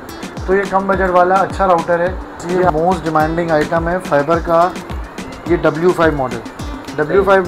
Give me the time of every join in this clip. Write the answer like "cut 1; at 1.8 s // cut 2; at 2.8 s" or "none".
cut 1; at 2.7 s